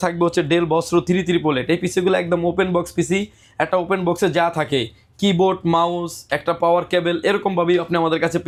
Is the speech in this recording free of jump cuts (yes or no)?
yes